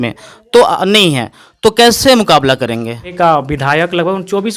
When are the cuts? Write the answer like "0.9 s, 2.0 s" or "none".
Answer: 3.1 s